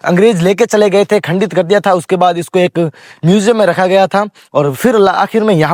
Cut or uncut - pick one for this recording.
uncut